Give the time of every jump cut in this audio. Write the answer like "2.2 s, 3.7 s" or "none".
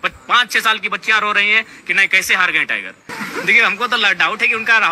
3.1 s